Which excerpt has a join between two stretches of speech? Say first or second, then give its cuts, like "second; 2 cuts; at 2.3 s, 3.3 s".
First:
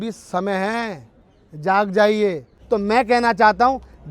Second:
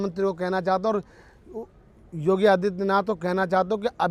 first; 1 cut; at 2.6 s